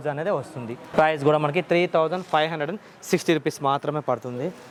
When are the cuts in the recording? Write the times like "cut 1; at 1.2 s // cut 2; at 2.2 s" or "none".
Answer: none

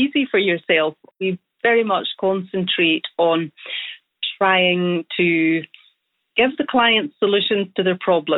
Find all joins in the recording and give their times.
cut 1; at 1.2 s

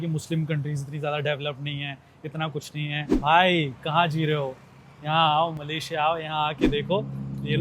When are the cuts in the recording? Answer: cut 1; at 3.1 s

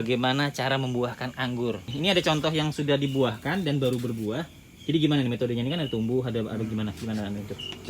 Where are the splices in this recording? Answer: cut 1; at 1.9 s

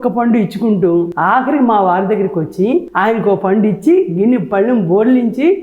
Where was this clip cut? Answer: cut 1; at 1.1 s // cut 2; at 2.9 s

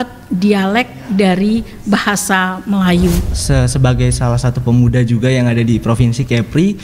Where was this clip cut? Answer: cut 1; at 3.3 s

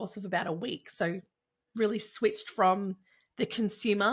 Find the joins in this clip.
none

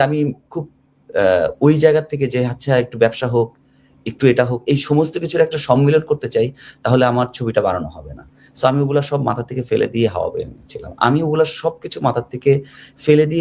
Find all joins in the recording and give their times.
none

